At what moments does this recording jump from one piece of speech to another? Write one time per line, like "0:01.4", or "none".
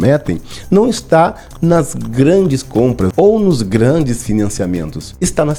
none